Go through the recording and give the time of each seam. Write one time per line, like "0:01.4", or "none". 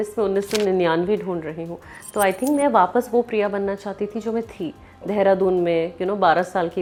none